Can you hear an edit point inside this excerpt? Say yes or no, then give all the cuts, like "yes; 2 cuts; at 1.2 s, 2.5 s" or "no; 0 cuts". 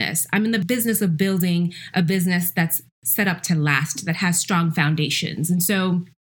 no; 0 cuts